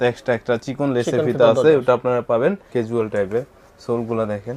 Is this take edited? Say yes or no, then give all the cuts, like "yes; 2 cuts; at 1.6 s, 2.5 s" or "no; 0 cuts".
yes; 1 cut; at 2.7 s